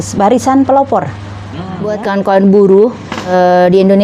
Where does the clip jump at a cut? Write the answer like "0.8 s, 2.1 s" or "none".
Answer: 1.8 s, 3.3 s